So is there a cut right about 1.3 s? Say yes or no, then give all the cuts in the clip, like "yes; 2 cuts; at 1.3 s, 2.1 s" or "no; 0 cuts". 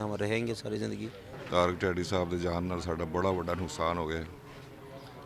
yes; 1 cut; at 1.3 s